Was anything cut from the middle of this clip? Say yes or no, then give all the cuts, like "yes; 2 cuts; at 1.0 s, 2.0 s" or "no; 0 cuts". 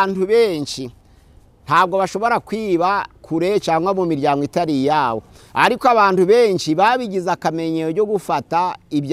no; 0 cuts